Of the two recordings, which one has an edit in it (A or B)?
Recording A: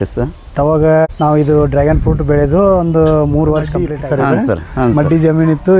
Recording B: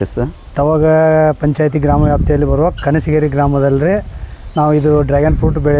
A